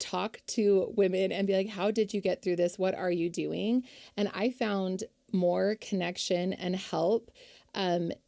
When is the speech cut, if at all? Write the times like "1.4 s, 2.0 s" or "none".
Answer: none